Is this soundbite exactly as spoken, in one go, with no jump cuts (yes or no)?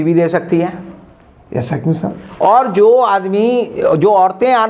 yes